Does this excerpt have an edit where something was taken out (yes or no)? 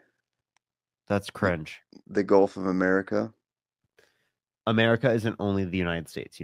no